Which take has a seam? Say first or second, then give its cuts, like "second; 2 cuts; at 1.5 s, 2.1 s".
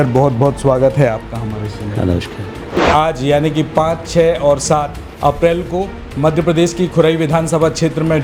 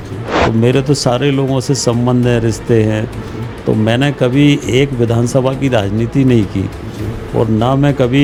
first; 1 cut; at 2.8 s